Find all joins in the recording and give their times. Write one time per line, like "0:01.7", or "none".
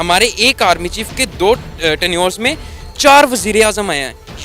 0:01.3